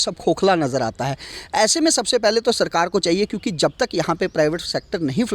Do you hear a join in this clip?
no; 0 cuts

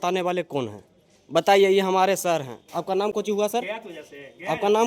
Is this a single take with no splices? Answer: yes; 0 cuts

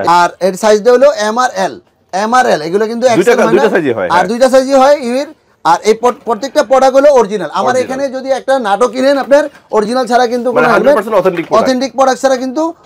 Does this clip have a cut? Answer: no; 0 cuts

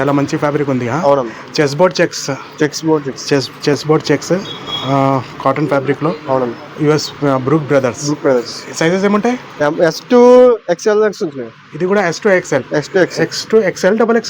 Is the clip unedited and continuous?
yes; 0 cuts

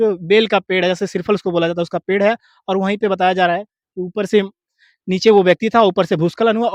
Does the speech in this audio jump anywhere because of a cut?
no; 0 cuts

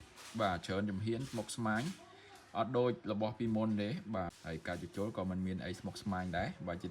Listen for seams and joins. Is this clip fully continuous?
no; 1 cut; at 4.5 s

